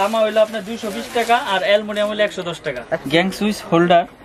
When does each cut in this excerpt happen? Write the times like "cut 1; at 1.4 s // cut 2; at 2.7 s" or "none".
cut 1; at 2.9 s